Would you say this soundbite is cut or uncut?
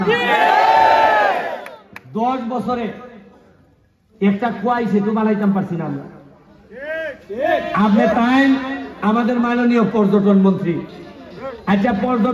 uncut